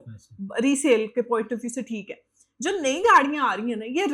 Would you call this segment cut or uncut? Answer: uncut